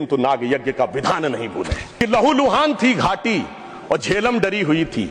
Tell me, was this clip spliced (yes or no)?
yes